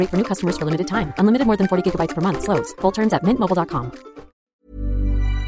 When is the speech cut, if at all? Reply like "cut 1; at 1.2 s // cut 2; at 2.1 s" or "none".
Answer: cut 1; at 4.4 s